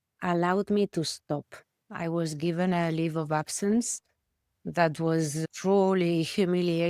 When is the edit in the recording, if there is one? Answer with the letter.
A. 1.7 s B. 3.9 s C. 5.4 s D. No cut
C